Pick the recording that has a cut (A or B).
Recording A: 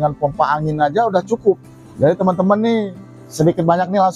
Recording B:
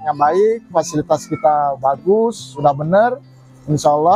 A